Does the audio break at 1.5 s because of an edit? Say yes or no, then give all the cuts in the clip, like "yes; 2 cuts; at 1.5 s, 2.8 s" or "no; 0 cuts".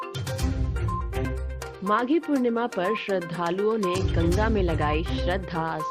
yes; 1 cut; at 1.5 s